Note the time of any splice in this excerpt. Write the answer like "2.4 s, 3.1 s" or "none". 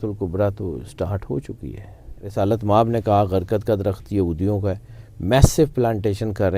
2.2 s